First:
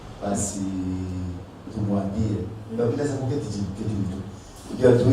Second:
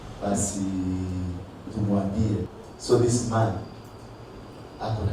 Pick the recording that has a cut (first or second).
second